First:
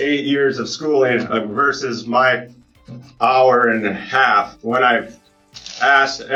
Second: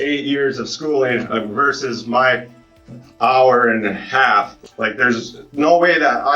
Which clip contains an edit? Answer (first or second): second